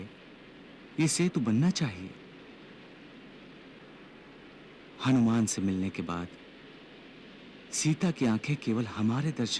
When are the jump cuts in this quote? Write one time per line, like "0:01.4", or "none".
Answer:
none